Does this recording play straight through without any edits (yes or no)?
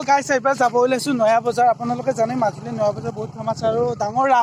yes